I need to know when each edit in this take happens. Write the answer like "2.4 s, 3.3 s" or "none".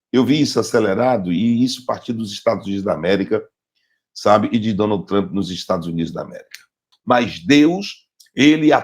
6.9 s